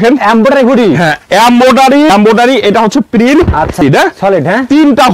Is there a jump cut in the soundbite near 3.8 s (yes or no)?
yes